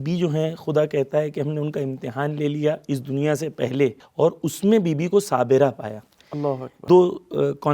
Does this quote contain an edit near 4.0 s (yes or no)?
yes